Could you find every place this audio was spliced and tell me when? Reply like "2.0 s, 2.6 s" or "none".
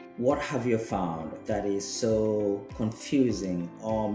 1.3 s, 2.7 s